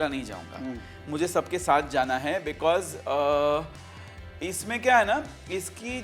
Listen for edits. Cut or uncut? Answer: uncut